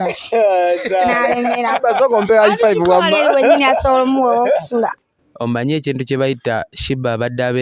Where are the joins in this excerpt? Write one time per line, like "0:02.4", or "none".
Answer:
0:04.9